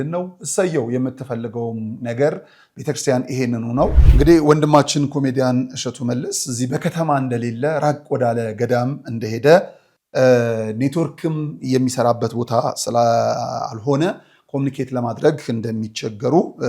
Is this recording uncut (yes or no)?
no